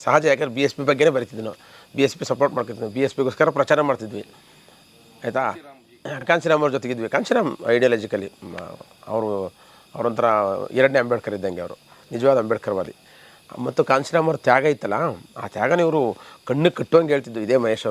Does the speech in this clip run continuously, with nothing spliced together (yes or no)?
yes